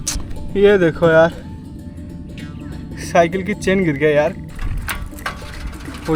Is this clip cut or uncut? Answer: cut